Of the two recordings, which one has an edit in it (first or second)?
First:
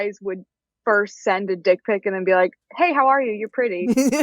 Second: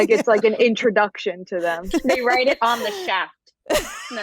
second